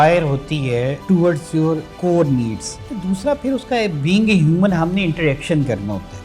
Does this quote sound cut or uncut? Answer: cut